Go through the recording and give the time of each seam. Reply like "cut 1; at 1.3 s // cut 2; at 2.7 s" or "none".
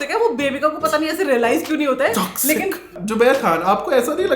cut 1; at 2.9 s

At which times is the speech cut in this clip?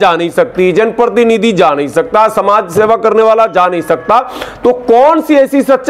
none

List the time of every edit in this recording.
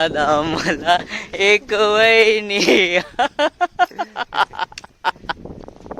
none

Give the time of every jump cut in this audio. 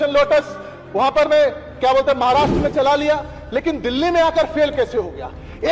none

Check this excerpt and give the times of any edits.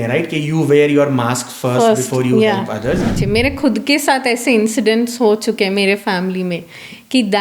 cut 1; at 3.1 s

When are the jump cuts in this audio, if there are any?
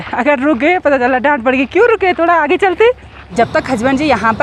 cut 1; at 3.1 s

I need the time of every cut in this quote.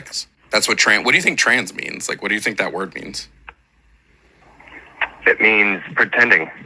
cut 1; at 1.0 s

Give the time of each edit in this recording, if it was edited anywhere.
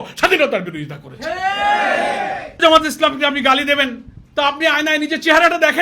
cut 1; at 2.6 s

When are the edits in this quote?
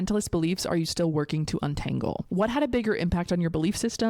cut 1; at 2.3 s

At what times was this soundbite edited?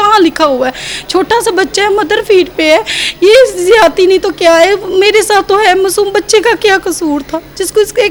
none

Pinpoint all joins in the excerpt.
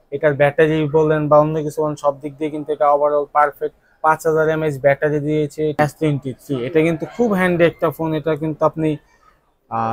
cut 1; at 5.7 s

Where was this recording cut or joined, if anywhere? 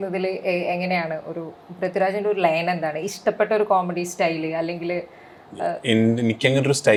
none

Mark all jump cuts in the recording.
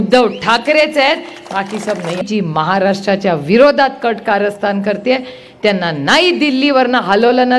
cut 1; at 2.2 s

